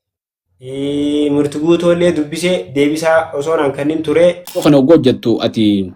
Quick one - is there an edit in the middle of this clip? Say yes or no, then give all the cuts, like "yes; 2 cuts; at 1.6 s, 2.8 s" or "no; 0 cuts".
yes; 1 cut; at 4.6 s